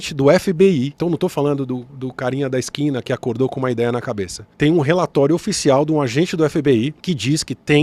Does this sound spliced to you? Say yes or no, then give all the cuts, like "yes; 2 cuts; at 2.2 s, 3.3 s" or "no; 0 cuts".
yes; 1 cut; at 0.9 s